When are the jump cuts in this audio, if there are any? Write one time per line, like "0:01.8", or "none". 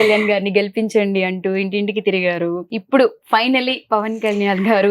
0:02.7